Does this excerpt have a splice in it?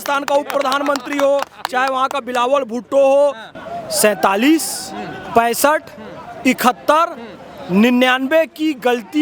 yes; 1 cut; at 3.5 s

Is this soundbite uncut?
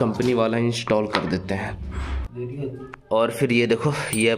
yes; 0 cuts

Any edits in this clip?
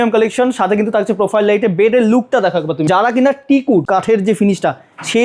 yes; 2 cuts; at 2.9 s, 3.9 s

